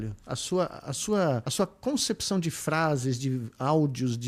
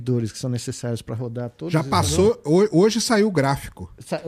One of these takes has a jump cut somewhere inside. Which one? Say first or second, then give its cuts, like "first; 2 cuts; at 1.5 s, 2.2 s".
first; 1 cut; at 1.5 s